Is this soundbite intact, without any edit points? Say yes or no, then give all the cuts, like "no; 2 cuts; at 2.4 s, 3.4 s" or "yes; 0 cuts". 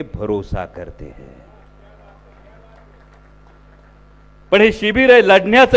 yes; 0 cuts